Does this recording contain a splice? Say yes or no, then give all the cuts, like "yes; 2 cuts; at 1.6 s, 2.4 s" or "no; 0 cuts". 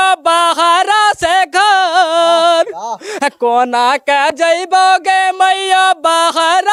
no; 0 cuts